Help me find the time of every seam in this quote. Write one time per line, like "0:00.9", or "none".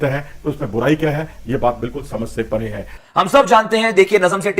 0:03.0